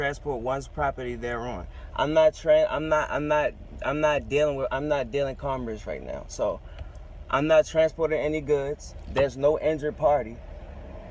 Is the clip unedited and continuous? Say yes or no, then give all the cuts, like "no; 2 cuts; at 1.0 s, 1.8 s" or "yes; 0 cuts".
yes; 0 cuts